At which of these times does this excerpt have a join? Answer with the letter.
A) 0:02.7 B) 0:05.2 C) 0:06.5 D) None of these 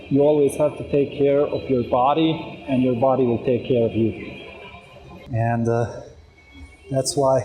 B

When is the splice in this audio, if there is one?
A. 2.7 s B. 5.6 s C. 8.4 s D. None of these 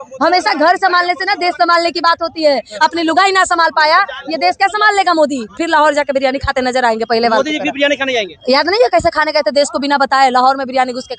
B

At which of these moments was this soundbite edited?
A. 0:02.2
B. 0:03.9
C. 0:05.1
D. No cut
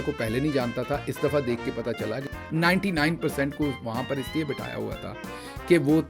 A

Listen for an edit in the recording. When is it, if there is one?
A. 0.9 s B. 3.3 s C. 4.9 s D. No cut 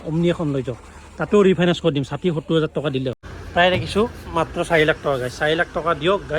B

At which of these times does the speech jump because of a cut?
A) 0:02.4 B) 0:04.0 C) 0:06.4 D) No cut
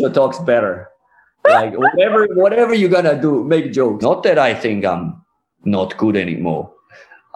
B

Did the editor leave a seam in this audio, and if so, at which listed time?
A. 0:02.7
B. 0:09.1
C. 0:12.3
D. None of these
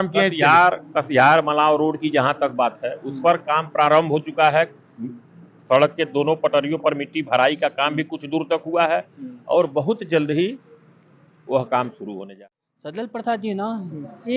C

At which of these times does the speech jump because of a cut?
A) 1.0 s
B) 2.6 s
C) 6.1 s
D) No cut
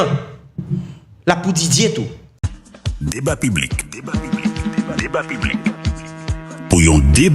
B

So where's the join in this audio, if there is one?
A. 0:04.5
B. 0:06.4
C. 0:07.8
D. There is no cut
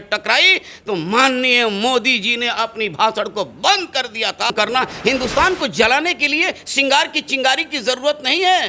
A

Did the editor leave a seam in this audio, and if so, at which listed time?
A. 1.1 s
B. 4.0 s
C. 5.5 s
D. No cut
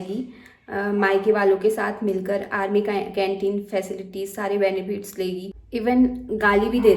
C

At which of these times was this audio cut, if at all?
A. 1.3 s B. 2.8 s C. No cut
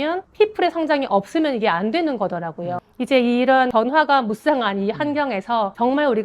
B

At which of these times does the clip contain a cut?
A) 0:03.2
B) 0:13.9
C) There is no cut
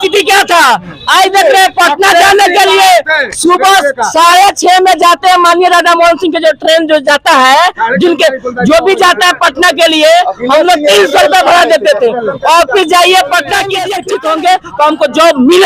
B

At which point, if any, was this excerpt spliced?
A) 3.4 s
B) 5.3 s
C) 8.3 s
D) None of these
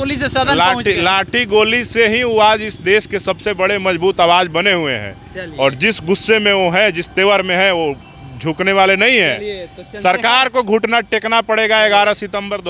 D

